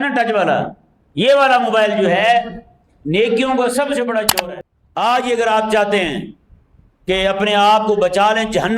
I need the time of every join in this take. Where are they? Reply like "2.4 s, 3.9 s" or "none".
4.3 s